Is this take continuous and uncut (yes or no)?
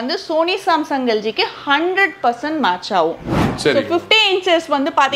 no